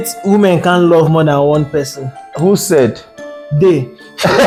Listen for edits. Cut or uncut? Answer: uncut